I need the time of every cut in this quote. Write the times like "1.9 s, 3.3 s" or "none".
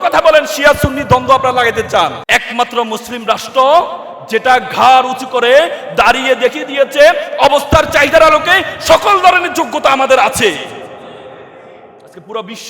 2.2 s

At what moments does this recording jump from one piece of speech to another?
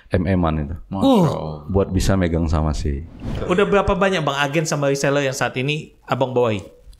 3.4 s

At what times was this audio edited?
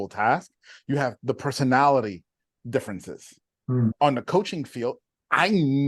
3.9 s

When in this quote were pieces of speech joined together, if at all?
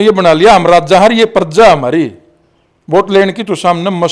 none

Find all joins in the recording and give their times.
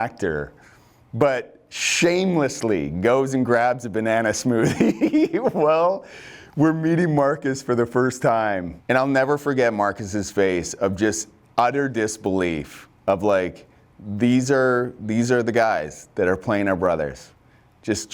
8.7 s

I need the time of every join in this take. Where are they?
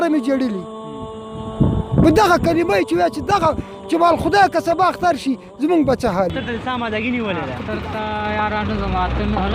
6.4 s

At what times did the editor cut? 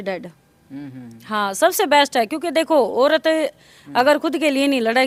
none

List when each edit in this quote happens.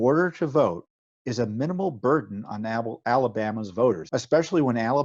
4.0 s

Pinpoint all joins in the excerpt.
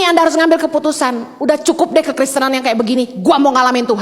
none

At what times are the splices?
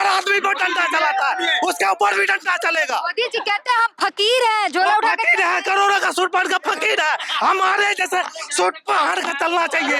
none

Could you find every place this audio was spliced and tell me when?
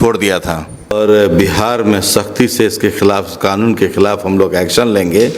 0.9 s

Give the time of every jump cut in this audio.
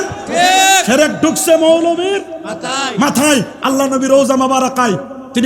3.5 s

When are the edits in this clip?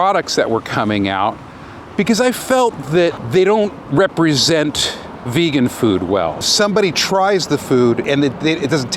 3.2 s, 6.5 s, 8.0 s

